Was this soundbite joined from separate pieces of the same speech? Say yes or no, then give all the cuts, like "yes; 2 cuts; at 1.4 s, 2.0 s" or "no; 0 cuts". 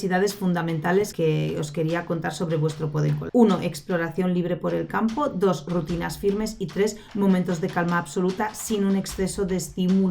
yes; 2 cuts; at 1.1 s, 3.2 s